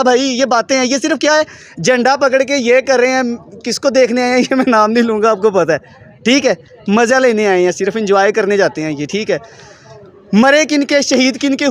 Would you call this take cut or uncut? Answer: uncut